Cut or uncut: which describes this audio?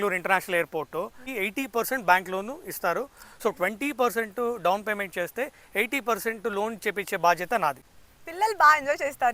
cut